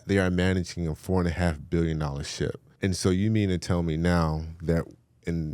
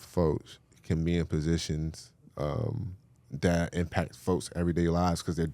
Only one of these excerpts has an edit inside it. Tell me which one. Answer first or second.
first